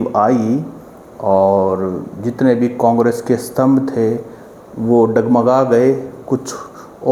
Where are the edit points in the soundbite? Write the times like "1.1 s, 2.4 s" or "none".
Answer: none